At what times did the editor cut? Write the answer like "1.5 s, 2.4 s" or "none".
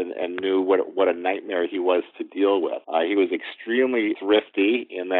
2.8 s, 4.1 s